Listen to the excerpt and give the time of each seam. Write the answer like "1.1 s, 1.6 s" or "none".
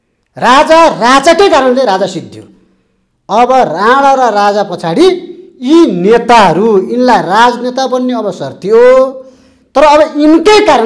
none